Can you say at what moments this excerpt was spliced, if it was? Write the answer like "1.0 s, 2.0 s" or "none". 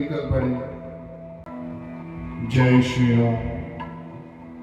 1.5 s

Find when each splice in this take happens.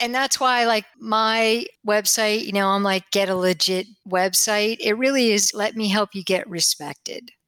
0.9 s, 4.0 s, 5.5 s

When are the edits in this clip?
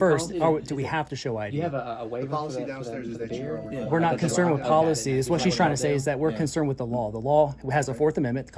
none

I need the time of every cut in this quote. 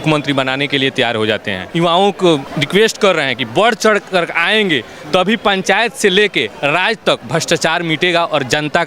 1.7 s, 2.5 s

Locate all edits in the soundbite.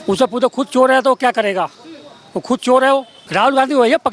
3.2 s

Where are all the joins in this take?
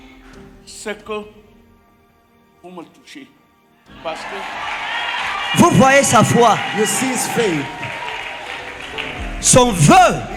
none

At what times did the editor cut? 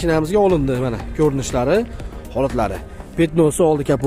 none

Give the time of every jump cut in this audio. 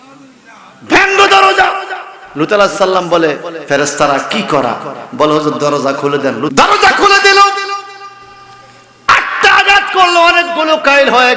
6.5 s

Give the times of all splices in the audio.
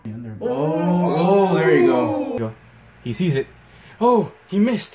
2.4 s

